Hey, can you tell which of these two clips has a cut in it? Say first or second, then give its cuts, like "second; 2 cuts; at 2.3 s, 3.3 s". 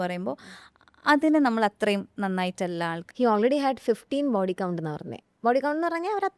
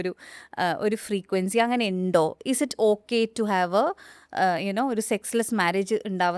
first; 1 cut; at 3.0 s